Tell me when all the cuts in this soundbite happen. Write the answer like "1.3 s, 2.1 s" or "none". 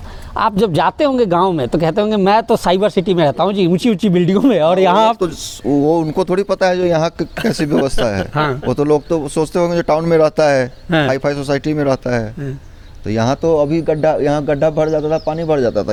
none